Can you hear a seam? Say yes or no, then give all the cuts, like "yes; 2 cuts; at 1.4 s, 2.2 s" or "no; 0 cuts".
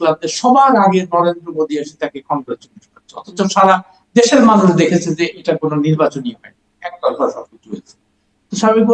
no; 0 cuts